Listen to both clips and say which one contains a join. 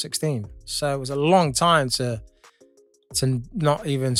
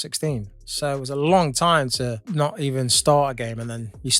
second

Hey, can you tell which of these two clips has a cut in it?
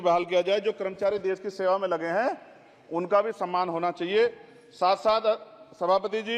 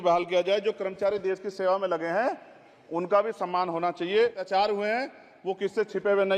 second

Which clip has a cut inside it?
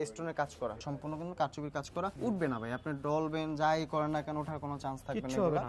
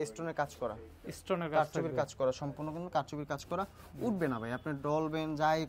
first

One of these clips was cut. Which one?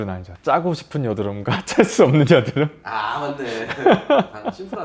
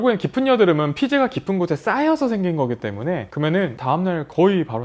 second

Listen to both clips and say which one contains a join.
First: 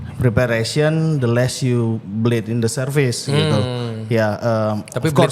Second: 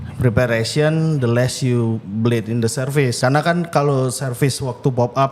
second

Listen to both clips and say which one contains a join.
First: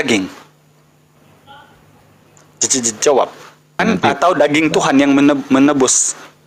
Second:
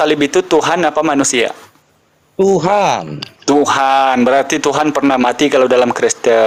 first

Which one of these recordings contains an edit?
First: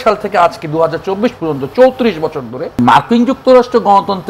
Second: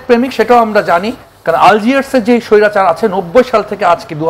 first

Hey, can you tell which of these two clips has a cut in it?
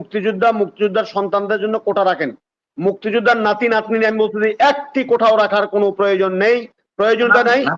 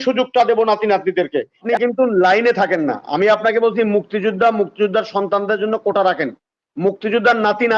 second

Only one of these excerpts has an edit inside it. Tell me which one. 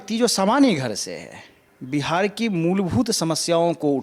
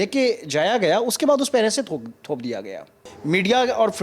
second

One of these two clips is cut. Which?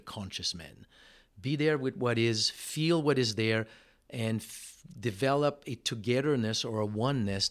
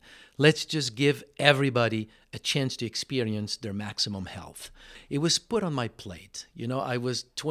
second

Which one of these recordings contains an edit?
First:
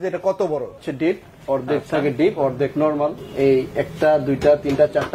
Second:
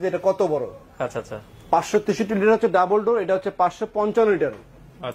first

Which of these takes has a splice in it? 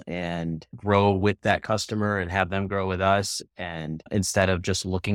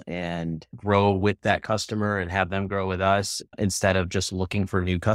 second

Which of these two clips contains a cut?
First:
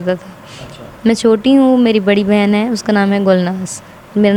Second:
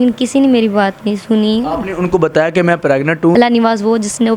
second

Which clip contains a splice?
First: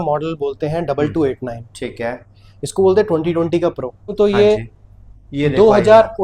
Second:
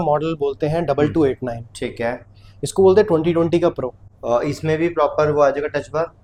first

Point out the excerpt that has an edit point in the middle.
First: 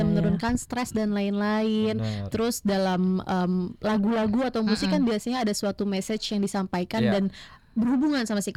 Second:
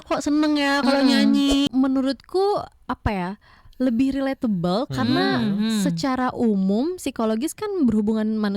second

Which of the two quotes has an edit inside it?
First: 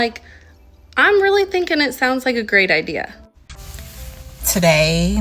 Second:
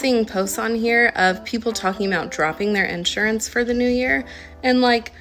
first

